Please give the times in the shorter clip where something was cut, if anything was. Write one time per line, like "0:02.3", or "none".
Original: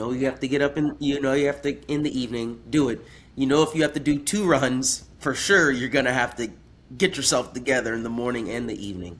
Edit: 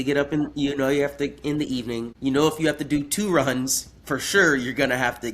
0:02.1